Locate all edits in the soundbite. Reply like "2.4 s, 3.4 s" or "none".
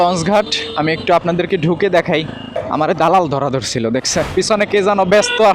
2.5 s, 4.3 s